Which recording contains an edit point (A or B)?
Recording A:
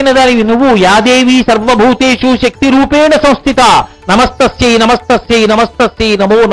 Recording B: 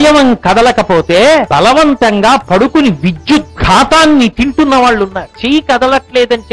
B